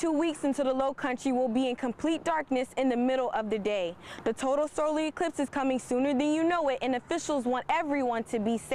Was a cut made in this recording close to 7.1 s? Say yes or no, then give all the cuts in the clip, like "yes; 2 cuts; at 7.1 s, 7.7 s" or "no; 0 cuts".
no; 0 cuts